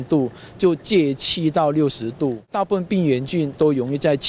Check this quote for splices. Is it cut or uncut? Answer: cut